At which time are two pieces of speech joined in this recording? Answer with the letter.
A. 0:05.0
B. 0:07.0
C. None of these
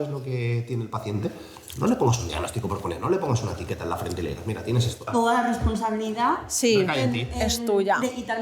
A